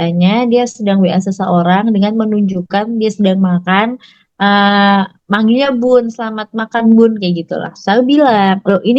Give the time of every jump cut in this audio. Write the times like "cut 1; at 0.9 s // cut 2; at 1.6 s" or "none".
none